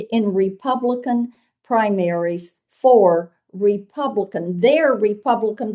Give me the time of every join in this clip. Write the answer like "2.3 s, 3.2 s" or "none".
none